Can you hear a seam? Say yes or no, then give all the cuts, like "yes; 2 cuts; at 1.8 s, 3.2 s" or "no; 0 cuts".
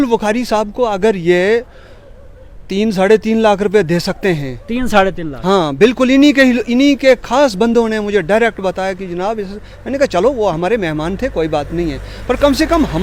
no; 0 cuts